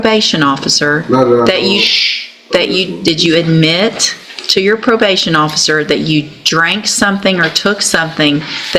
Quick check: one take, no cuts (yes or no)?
yes